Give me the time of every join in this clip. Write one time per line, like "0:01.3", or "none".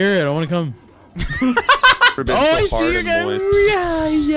0:02.2